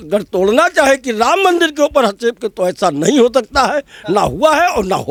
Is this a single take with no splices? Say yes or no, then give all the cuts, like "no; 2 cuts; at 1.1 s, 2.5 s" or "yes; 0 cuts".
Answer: yes; 0 cuts